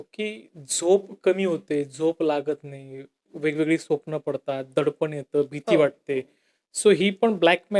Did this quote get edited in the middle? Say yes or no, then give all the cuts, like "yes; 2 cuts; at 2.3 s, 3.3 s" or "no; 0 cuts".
no; 0 cuts